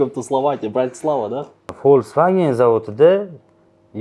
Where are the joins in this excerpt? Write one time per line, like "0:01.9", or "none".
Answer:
0:01.7